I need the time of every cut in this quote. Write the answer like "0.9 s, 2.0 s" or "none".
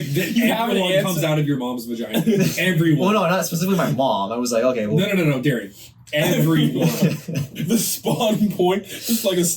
7.5 s